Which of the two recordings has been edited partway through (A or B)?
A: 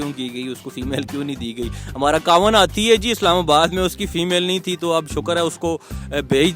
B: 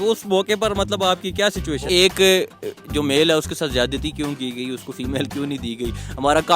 B